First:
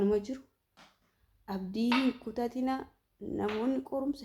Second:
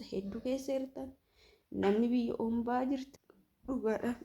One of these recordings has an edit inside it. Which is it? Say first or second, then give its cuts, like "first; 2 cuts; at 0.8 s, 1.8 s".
second; 1 cut; at 3.1 s